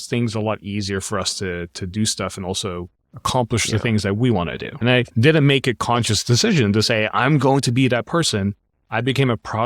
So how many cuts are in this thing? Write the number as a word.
one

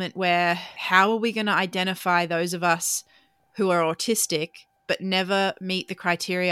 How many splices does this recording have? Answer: zero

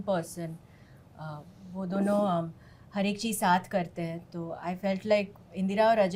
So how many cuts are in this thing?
zero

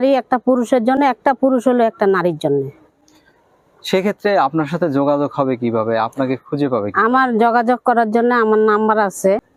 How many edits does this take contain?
zero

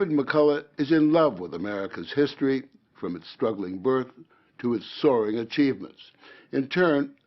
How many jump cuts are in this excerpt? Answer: one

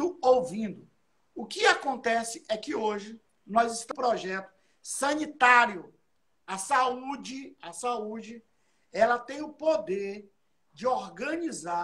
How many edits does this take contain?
one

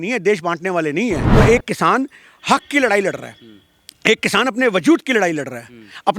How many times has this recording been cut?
one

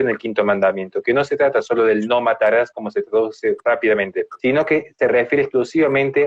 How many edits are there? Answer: one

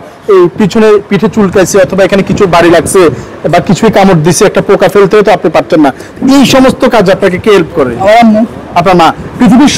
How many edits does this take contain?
zero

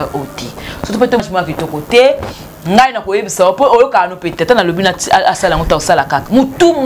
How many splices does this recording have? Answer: one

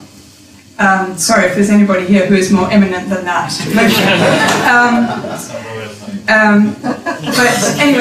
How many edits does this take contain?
one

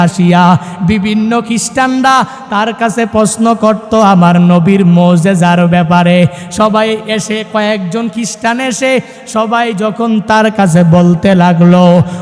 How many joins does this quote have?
zero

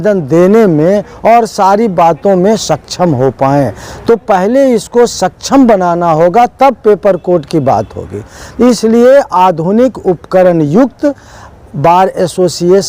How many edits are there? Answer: zero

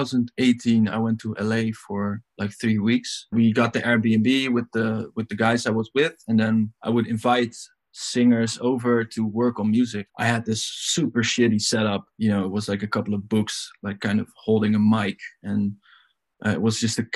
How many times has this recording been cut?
four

